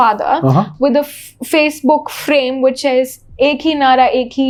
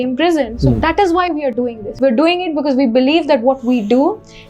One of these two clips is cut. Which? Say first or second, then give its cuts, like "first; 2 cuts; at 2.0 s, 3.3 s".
second; 1 cut; at 1.9 s